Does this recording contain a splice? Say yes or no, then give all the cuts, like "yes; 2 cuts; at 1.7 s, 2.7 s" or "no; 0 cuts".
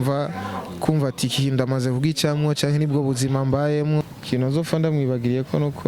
yes; 1 cut; at 4.0 s